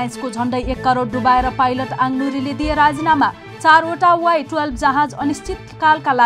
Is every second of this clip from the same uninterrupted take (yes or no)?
yes